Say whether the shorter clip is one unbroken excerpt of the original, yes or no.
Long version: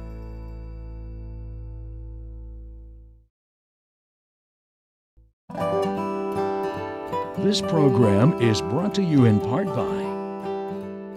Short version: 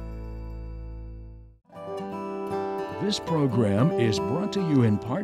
no